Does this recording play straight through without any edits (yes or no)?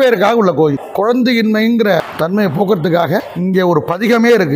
no